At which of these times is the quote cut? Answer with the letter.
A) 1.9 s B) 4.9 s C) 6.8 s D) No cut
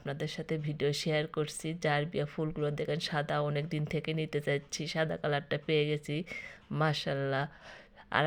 D